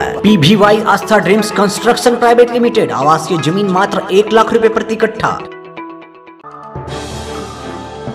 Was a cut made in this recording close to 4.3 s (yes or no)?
no